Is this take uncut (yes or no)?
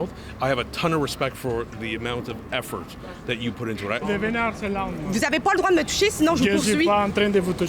no